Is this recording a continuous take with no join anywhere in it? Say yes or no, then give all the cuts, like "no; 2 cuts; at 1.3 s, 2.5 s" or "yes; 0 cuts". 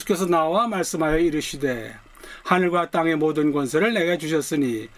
yes; 0 cuts